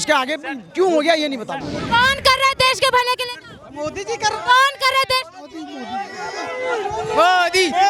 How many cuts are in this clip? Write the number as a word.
one